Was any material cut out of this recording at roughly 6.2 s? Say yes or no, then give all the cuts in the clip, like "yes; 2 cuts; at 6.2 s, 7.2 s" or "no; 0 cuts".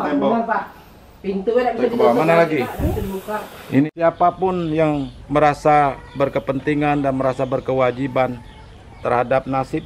no; 1 cut; at 3.8 s